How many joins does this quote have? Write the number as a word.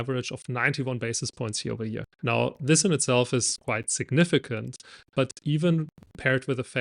two